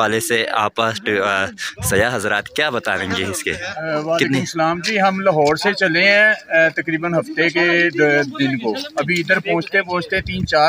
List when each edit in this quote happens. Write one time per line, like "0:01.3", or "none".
none